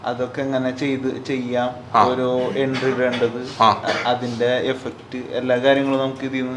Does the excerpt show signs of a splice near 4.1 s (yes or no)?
no